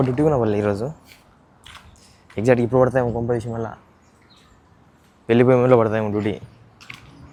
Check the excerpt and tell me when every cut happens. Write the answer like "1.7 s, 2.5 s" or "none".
none